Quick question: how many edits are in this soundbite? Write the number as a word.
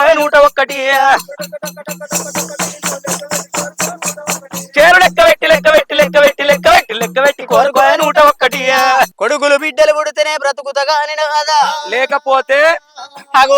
one